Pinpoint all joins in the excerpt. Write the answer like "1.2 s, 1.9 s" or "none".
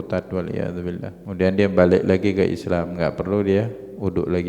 1.2 s